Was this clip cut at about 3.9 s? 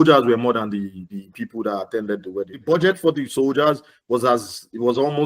no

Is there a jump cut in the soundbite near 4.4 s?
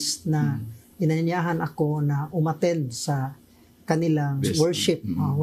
yes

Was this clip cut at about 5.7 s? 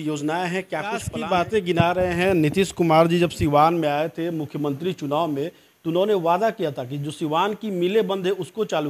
no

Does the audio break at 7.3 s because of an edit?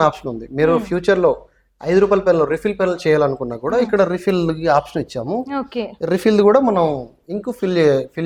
no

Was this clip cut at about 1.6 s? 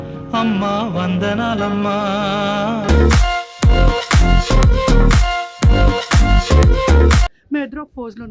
no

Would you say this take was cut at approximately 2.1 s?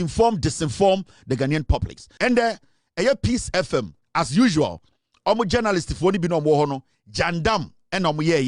yes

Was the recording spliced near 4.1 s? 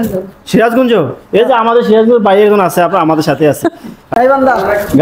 yes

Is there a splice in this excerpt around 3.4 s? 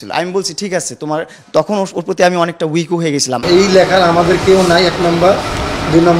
yes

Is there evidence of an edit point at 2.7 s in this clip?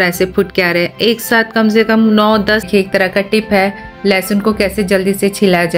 yes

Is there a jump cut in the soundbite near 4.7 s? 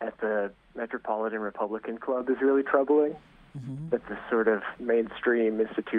yes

